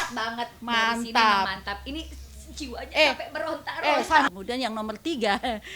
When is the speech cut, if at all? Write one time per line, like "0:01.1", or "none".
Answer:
0:04.3